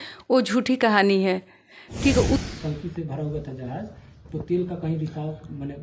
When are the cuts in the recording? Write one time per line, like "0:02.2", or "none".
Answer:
0:02.4